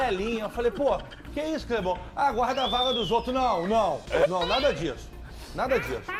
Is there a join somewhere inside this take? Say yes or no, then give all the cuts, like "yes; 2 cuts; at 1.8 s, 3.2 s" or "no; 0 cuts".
no; 0 cuts